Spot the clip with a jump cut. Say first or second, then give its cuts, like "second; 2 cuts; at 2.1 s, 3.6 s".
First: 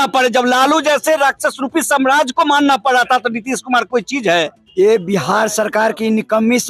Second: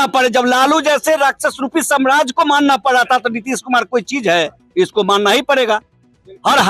first; 1 cut; at 4.6 s